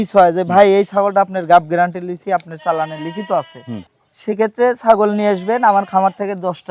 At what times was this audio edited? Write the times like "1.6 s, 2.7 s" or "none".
none

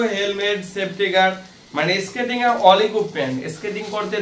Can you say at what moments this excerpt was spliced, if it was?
none

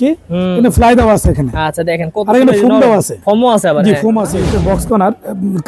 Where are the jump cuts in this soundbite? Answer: 4.5 s

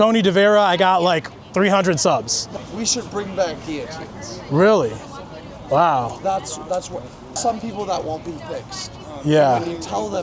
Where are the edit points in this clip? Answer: 2.5 s, 7.4 s

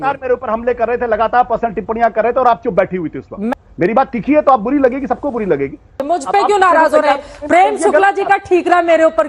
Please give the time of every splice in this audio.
3.5 s, 6.0 s

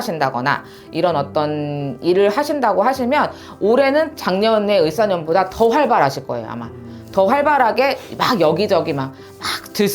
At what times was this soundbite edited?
none

